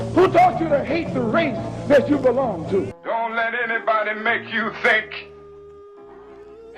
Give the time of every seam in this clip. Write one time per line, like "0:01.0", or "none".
0:03.0